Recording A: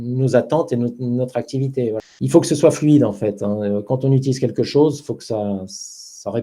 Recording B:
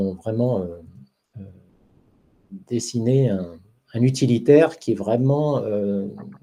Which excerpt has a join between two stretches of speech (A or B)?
A